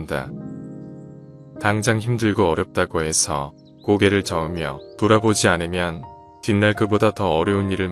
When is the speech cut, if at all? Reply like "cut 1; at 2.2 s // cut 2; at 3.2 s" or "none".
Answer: none